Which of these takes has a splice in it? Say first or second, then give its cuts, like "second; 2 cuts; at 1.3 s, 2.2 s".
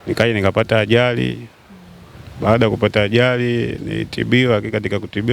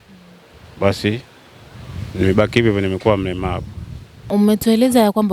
second; 1 cut; at 4.2 s